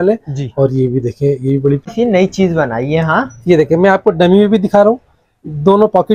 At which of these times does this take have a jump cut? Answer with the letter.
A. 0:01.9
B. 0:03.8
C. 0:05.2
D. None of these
A